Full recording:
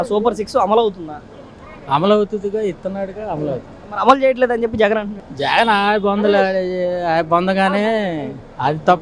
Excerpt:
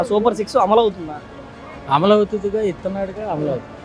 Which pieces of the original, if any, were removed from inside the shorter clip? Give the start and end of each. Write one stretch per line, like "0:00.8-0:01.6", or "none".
none